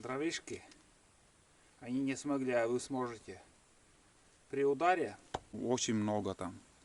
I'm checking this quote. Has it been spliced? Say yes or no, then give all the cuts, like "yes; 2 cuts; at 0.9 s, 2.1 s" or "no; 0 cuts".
yes; 1 cut; at 5.5 s